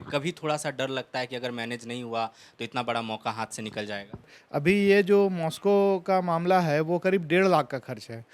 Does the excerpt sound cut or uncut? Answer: cut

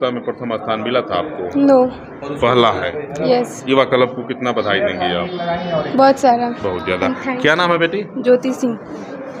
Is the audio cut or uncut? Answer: uncut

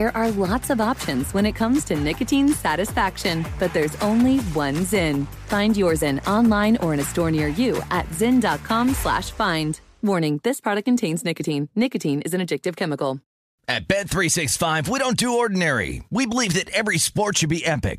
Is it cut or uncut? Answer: cut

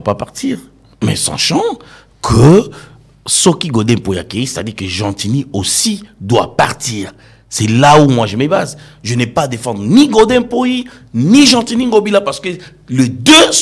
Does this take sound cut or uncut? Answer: uncut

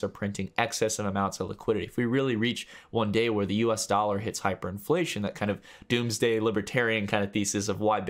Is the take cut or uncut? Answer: uncut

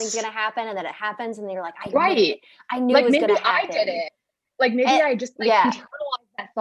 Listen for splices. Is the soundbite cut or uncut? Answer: uncut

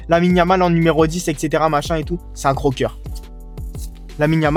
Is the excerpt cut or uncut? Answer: uncut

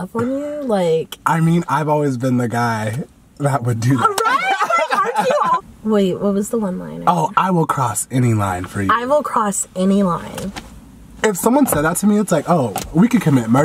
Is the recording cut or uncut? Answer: cut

